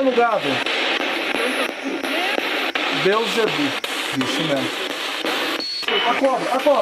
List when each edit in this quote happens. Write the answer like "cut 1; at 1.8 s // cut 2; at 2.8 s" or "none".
cut 1; at 5.8 s